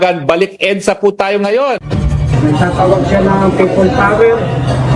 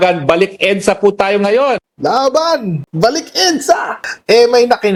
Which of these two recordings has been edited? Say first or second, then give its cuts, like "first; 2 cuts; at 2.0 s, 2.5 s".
first; 1 cut; at 1.9 s